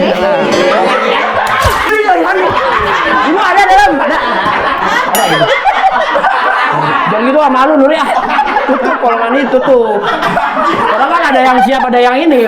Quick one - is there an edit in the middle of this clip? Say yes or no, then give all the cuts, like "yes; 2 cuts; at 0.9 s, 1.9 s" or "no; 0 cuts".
yes; 1 cut; at 1.9 s